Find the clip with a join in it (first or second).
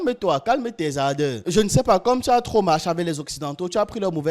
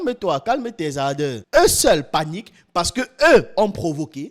second